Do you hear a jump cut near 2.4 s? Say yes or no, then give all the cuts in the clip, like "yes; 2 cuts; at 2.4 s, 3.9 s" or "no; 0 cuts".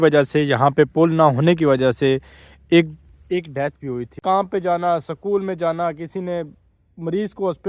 no; 1 cut; at 4.1 s